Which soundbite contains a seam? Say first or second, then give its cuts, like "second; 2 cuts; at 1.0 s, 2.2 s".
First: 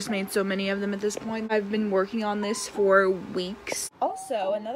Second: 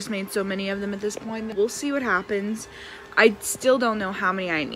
first; 2 cuts; at 1.4 s, 3.9 s